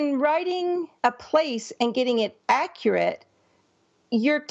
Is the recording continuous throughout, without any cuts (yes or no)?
no